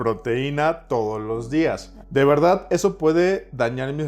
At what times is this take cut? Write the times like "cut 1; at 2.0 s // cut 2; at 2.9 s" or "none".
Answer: cut 1; at 1.9 s